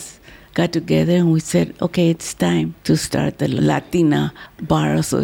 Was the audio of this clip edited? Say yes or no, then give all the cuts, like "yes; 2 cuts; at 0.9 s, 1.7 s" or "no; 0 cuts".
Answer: yes; 1 cut; at 2.8 s